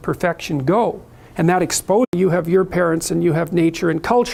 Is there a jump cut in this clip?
no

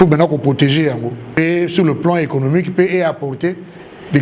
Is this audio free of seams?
no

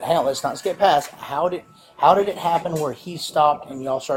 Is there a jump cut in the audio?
no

